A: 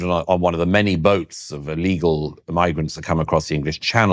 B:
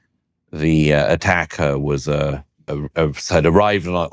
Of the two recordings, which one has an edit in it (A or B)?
B